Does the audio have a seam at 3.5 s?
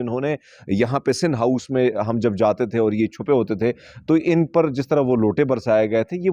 no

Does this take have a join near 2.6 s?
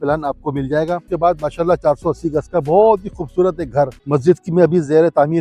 no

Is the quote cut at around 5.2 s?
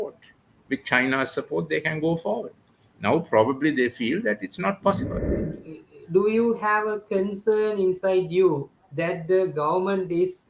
yes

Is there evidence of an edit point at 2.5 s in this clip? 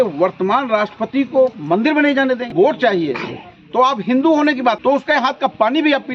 yes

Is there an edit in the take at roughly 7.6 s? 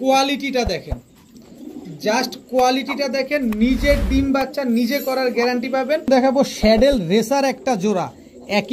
no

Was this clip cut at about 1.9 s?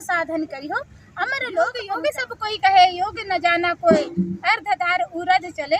yes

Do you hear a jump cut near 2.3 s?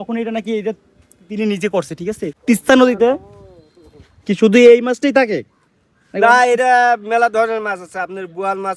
yes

